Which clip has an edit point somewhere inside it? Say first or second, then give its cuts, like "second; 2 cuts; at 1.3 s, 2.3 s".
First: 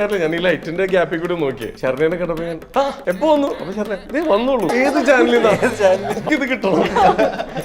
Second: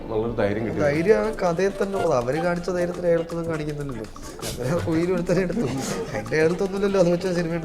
first; 4 cuts; at 1.7 s, 3.0 s, 4.7 s, 6.2 s